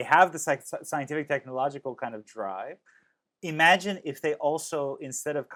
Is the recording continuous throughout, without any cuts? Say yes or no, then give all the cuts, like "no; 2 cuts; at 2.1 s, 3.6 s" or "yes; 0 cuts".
yes; 0 cuts